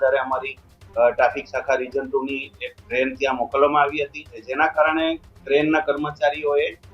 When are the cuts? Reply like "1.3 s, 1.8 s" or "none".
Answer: 4.4 s